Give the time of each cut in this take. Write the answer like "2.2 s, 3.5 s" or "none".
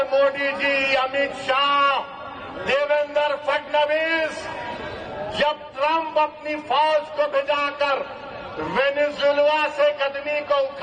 none